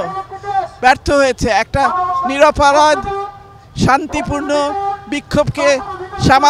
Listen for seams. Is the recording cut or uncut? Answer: uncut